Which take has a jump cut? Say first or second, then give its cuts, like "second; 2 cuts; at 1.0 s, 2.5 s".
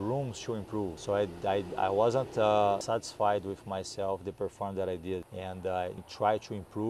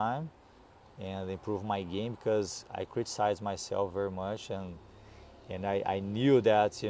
first; 3 cuts; at 1.0 s, 2.8 s, 5.5 s